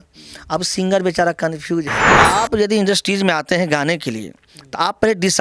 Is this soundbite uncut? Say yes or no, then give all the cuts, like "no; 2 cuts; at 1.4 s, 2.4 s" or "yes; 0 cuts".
no; 1 cut; at 2.1 s